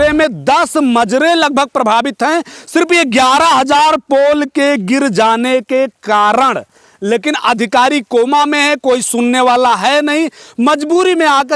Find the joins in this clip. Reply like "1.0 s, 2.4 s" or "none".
none